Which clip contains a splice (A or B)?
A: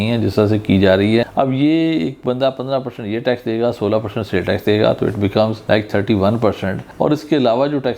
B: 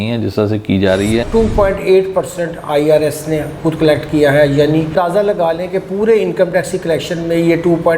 B